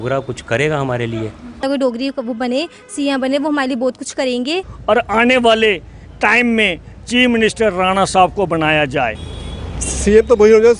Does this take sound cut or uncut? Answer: cut